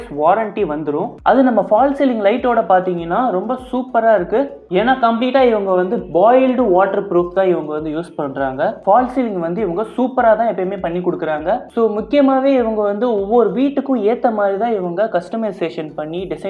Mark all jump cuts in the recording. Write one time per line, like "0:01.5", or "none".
0:01.2
0:04.6
0:08.8
0:11.7

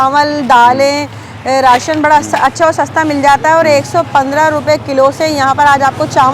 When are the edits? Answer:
none

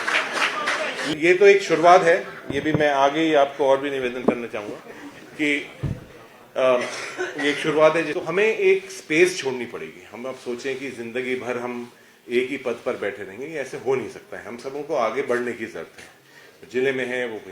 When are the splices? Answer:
0:01.1
0:08.1

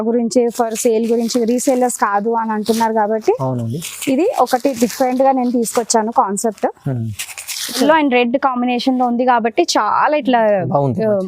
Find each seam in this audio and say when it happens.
0:07.8

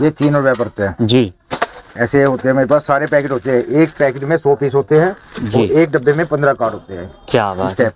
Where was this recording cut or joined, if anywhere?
none

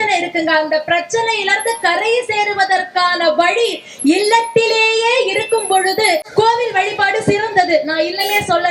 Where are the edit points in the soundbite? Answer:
0:06.2

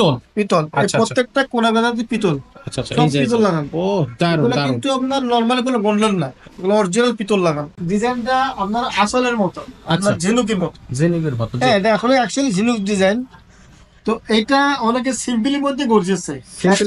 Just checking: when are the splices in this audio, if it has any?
0:07.7

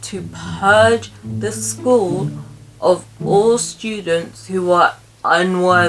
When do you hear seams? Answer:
none

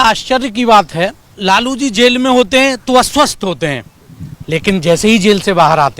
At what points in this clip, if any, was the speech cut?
0:01.3

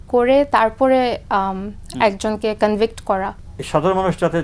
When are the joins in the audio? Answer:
0:03.3

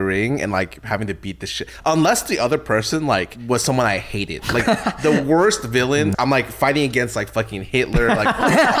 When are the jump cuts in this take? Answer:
0:03.3
0:06.2

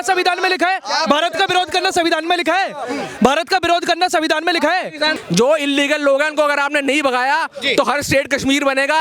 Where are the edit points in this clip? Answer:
0:05.2

